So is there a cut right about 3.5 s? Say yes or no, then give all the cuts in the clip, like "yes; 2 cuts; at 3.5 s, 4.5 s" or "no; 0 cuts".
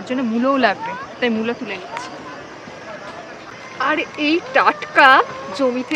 yes; 1 cut; at 3.5 s